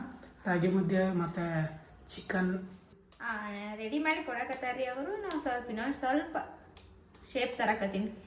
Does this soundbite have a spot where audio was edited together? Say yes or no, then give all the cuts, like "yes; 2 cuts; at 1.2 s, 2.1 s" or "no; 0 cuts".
yes; 1 cut; at 3.2 s